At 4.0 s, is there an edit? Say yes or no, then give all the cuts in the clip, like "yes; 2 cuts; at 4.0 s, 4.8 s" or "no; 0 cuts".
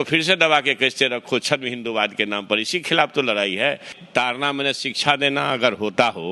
yes; 1 cut; at 4.0 s